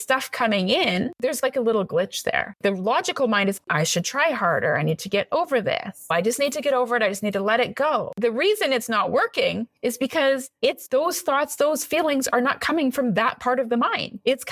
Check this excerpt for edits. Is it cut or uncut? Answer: cut